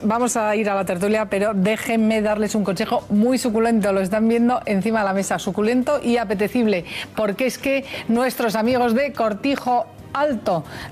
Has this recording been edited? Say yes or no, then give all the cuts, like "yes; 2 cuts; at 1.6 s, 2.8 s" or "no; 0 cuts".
no; 0 cuts